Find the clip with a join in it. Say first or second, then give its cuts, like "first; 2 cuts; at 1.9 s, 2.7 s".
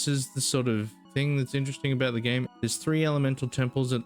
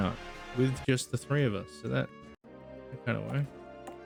first; 2 cuts; at 1.0 s, 2.5 s